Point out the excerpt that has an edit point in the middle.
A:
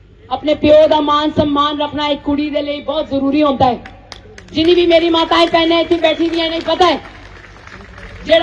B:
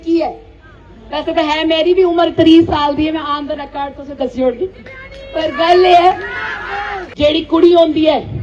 B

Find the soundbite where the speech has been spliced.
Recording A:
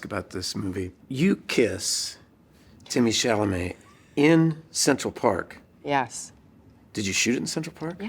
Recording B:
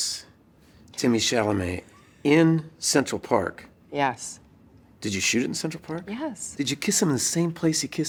A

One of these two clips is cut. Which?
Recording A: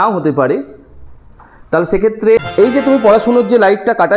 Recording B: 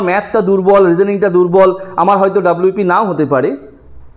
A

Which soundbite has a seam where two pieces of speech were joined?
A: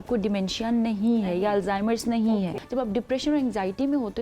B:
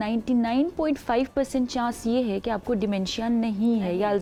A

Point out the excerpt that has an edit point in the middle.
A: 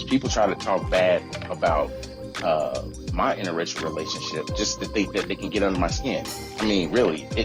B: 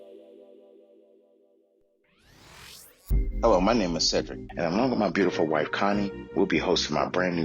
B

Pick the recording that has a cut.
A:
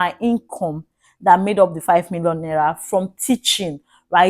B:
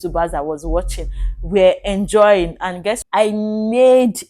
B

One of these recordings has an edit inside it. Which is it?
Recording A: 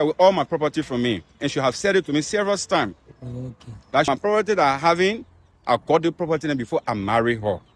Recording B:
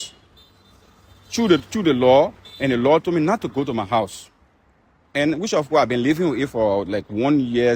A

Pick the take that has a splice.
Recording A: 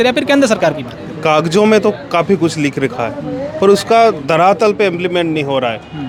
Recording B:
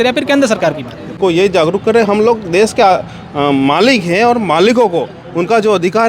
B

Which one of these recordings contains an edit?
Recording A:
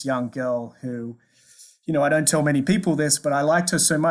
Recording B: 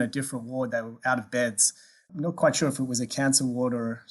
B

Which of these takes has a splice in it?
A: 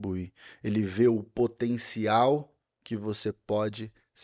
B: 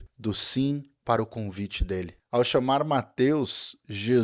B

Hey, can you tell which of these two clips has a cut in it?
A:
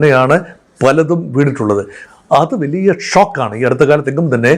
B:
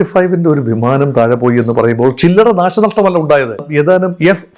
B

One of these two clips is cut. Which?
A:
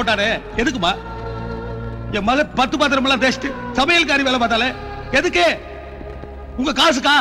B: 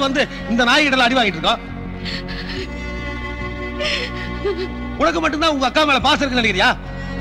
B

